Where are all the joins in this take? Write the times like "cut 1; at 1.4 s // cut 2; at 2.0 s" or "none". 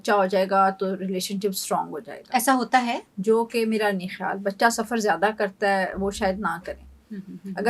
none